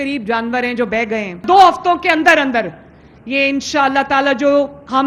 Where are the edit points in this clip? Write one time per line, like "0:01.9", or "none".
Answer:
0:01.4